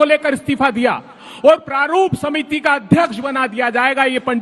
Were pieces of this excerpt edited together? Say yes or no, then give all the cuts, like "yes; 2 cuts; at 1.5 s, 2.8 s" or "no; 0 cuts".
yes; 1 cut; at 1.2 s